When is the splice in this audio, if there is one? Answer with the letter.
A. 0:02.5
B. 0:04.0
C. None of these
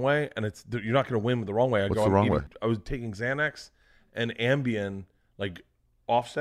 A